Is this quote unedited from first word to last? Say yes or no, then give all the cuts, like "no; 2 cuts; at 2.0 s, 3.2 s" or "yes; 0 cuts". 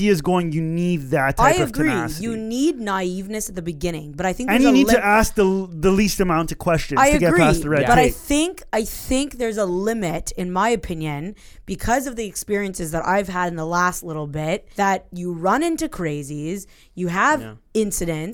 no; 1 cut; at 14.7 s